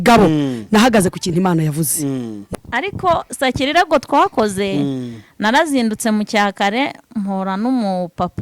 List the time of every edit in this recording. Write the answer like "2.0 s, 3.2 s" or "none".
2.4 s